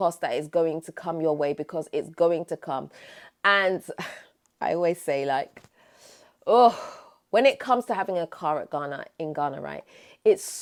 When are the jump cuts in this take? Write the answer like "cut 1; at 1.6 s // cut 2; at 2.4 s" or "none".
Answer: none